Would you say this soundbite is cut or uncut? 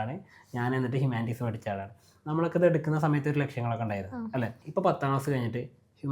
cut